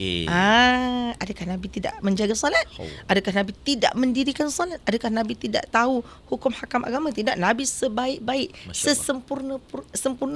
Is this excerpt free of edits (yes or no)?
yes